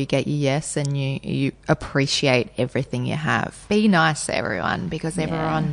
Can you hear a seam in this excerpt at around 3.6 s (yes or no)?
yes